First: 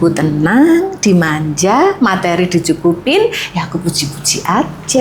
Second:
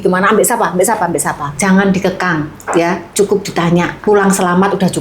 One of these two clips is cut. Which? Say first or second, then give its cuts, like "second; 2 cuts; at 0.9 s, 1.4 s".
second; 2 cuts; at 1.5 s, 3.9 s